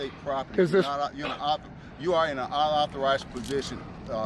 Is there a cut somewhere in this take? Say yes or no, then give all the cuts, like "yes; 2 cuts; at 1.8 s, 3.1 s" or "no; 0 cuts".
no; 0 cuts